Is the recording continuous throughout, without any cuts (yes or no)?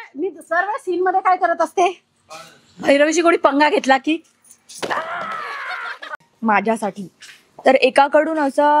no